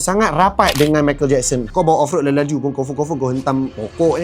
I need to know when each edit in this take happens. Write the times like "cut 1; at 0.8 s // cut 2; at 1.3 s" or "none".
cut 1; at 1.7 s